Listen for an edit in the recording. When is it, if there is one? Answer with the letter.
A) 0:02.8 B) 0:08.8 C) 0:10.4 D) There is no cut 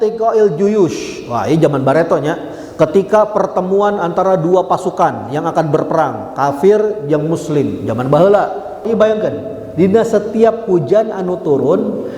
B